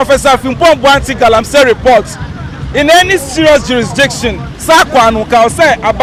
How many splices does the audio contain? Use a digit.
0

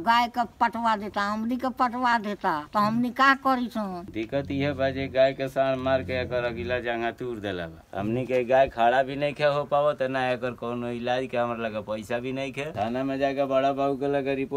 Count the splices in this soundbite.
3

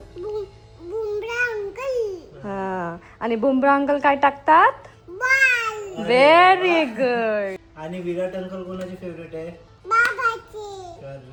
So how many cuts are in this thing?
0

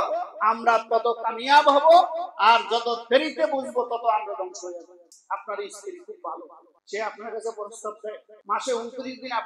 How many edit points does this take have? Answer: 2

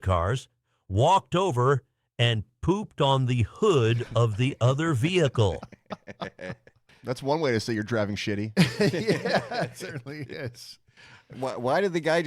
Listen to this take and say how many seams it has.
1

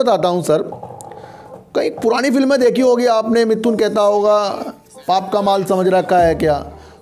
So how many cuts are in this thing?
0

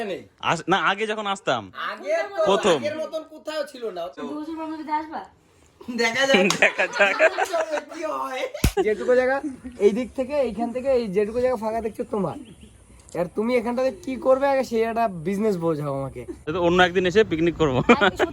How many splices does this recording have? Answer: 3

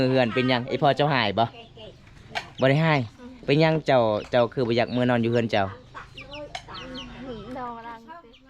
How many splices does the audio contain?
0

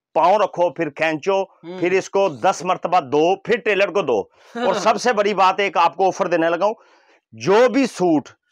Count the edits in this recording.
0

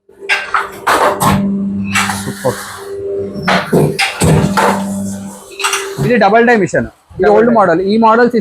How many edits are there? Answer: 1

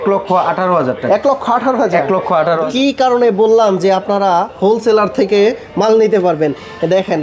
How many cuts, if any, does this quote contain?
1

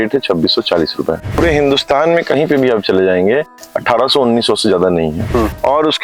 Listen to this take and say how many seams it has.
2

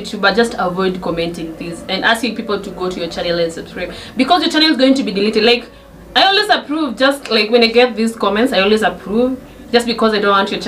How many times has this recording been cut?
0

